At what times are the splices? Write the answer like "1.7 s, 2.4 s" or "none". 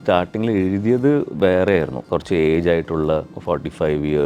2.0 s, 3.3 s